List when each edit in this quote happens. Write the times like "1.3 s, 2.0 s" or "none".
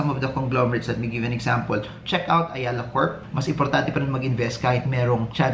3.2 s